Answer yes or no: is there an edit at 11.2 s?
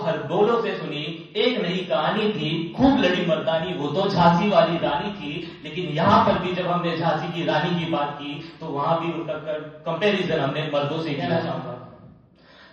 yes